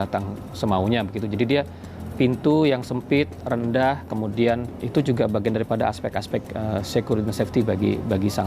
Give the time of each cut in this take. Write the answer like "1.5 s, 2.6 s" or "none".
4.8 s